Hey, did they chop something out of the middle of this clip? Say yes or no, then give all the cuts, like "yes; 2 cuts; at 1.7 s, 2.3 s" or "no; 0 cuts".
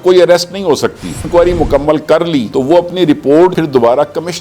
yes; 1 cut; at 1.2 s